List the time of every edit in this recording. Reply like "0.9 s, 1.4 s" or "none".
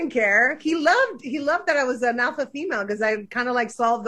none